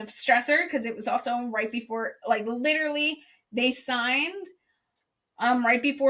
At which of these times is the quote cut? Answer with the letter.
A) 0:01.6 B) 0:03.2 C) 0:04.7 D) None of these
D